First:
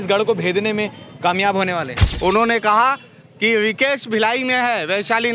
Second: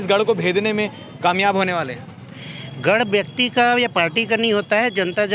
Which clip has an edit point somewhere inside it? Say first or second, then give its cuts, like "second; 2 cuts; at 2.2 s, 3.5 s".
first; 1 cut; at 2.0 s